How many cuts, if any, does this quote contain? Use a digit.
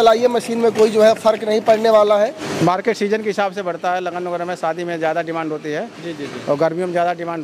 1